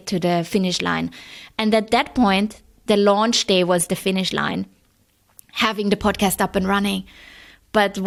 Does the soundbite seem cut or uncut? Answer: uncut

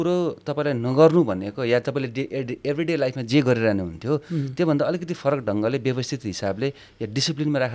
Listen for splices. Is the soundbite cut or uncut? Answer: uncut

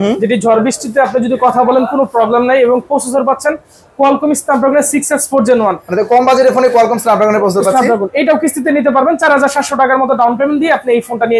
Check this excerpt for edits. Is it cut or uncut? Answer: uncut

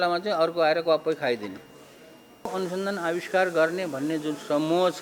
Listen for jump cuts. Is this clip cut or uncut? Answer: cut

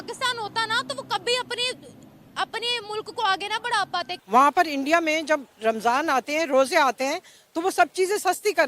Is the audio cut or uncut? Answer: cut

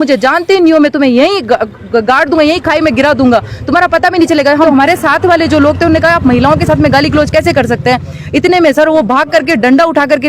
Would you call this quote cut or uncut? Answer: cut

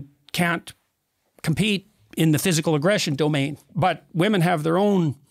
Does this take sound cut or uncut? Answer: cut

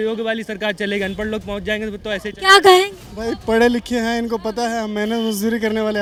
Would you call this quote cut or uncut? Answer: uncut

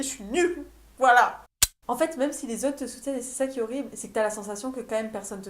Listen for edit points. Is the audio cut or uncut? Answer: cut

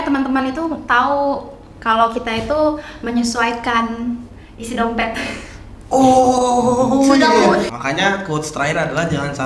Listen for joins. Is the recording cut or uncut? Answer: cut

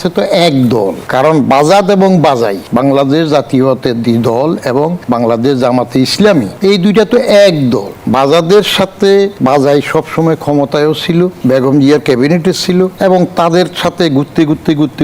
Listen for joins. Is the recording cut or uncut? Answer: cut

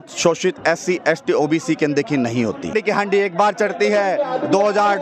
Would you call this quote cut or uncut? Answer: cut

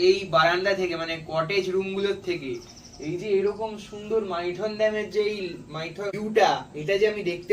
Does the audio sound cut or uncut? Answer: cut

